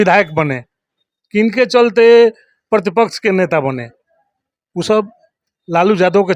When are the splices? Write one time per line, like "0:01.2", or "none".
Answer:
none